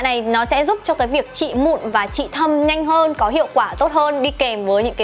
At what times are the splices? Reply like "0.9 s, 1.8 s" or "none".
none